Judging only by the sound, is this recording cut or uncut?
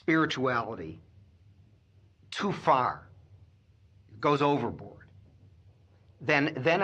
uncut